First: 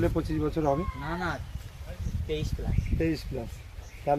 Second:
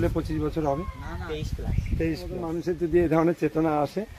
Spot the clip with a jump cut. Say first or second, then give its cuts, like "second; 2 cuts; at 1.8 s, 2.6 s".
second; 2 cuts; at 1.0 s, 2.5 s